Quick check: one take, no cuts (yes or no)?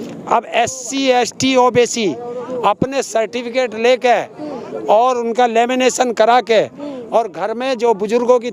yes